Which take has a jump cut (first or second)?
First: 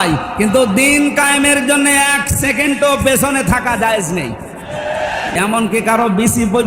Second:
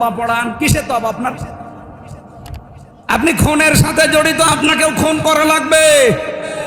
first